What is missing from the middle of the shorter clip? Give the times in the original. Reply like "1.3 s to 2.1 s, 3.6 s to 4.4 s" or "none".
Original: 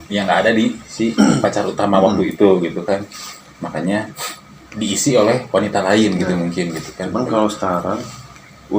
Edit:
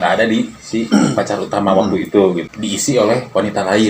2.7 s to 4.7 s